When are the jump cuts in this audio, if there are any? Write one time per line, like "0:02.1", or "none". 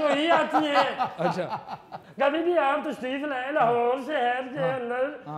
0:02.0